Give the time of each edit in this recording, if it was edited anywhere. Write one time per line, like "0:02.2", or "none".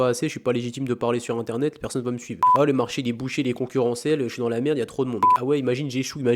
0:02.4
0:05.3